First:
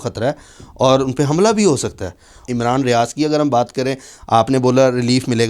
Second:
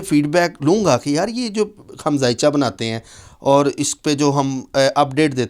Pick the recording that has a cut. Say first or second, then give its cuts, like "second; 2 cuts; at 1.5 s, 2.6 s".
first; 1 cut; at 2.5 s